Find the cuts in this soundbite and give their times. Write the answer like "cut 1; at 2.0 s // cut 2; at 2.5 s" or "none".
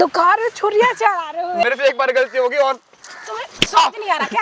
cut 1; at 1.6 s